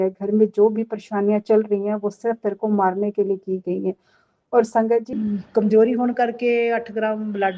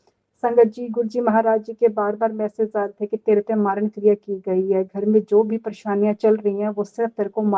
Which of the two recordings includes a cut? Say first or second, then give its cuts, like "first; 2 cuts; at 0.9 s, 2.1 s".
first; 1 cut; at 5.1 s